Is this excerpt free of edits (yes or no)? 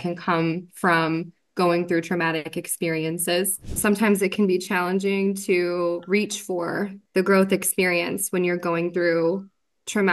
no